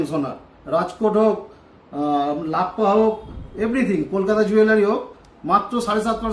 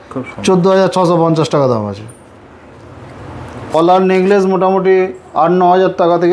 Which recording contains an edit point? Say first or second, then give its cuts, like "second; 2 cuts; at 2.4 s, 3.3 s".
second; 1 cut; at 3.7 s